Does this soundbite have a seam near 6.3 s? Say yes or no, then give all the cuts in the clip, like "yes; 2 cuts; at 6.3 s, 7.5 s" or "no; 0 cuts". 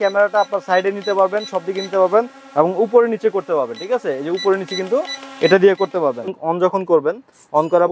yes; 1 cut; at 6.3 s